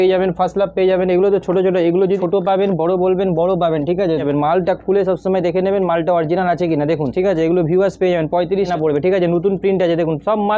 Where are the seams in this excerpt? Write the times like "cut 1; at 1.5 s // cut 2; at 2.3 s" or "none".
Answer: cut 1; at 2.2 s // cut 2; at 4.2 s // cut 3; at 7.1 s // cut 4; at 8.7 s